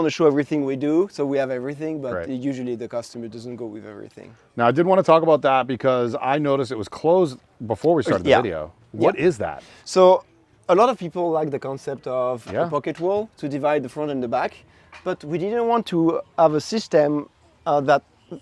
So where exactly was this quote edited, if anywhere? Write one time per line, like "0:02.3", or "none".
none